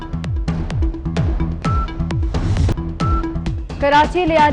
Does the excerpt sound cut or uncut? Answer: cut